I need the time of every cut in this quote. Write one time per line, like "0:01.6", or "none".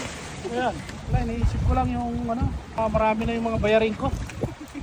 0:00.9
0:02.8